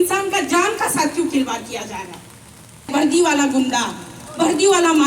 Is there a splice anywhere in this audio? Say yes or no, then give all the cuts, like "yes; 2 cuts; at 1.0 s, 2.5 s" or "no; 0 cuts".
yes; 1 cut; at 2.9 s